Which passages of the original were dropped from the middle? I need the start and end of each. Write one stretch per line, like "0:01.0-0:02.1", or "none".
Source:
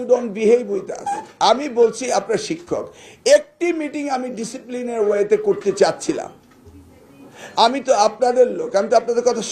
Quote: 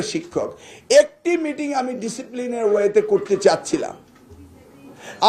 none